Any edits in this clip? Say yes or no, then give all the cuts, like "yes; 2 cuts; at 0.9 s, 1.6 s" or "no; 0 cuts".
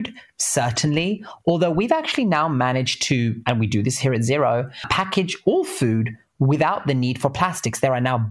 no; 0 cuts